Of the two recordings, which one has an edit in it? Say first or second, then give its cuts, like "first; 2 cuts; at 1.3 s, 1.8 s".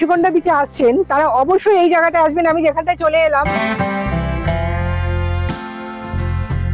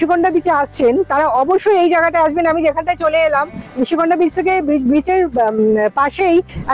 first; 1 cut; at 3.5 s